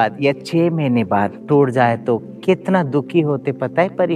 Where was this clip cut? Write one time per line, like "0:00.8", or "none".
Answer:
0:01.4